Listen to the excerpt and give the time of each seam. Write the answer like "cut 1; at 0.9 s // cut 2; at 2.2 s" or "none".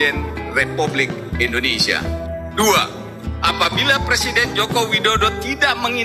cut 1; at 2.4 s